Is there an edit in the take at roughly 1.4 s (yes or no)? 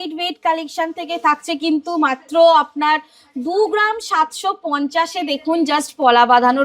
no